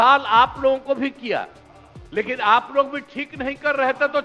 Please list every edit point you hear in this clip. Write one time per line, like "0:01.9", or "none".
none